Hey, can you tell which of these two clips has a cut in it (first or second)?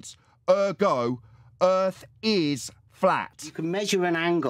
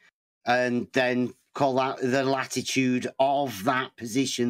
first